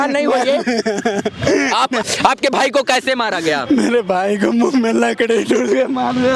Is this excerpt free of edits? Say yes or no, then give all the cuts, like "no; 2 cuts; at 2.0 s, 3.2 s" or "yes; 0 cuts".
no; 1 cut; at 2.0 s